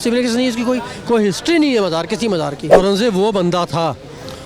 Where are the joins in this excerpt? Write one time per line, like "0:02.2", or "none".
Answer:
0:02.6